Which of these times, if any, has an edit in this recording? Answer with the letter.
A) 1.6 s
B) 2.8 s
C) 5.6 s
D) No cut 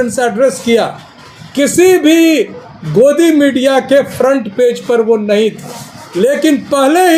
D